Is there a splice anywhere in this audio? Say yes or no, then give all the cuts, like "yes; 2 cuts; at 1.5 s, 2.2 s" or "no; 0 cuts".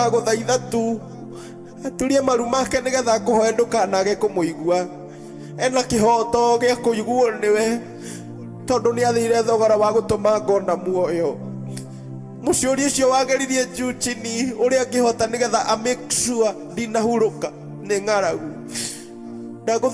no; 0 cuts